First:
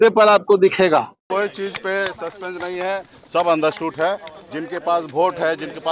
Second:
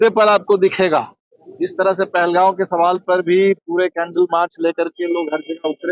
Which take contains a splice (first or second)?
first